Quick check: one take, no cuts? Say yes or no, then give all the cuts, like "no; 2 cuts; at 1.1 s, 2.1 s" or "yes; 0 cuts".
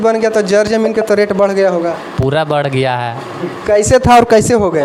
yes; 0 cuts